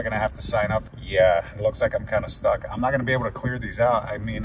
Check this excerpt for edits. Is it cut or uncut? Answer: cut